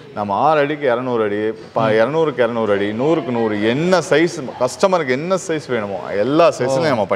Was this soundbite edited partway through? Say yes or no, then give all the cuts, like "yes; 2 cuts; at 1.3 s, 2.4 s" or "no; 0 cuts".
no; 0 cuts